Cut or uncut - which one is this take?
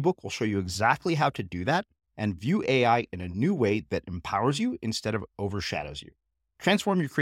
uncut